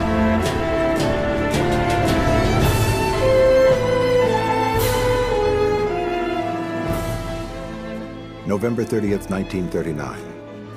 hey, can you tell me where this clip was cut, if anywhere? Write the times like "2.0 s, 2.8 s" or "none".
8.8 s